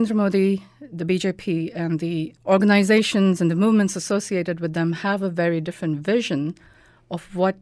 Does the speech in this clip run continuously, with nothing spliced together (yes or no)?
no